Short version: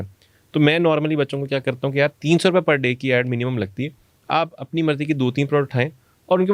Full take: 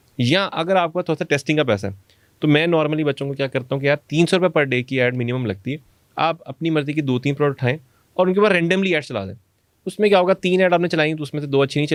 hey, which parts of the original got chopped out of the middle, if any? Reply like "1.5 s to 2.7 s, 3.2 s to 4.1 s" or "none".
none